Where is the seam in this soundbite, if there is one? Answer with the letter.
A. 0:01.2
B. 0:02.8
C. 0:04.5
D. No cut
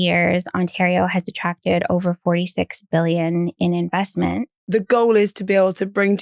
C